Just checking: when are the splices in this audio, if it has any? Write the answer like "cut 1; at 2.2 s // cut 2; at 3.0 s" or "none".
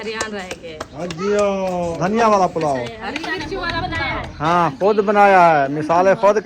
cut 1; at 1.9 s